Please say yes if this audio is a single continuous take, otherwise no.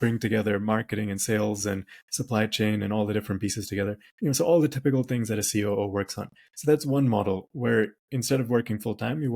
yes